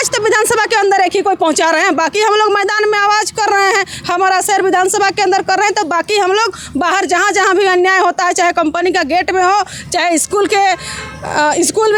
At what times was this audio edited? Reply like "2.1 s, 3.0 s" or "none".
none